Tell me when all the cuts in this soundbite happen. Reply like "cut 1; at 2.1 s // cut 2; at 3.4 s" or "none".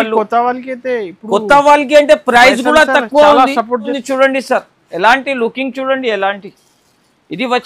cut 1; at 4.0 s